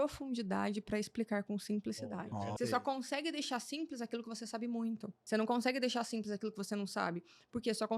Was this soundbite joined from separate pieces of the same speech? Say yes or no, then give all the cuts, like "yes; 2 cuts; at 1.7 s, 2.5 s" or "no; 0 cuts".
yes; 2 cuts; at 2.6 s, 5.2 s